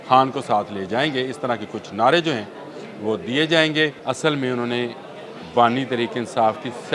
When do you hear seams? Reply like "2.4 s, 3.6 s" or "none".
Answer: 4.0 s